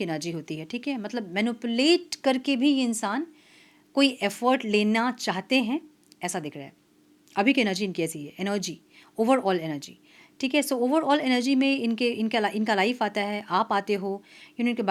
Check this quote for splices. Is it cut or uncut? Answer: uncut